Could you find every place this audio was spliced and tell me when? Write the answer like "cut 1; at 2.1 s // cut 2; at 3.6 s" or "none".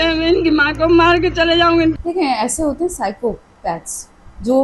cut 1; at 2.0 s